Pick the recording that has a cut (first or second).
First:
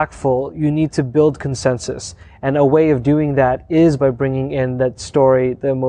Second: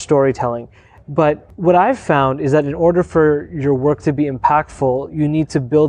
second